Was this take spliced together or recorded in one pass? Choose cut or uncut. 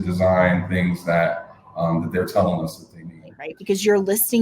cut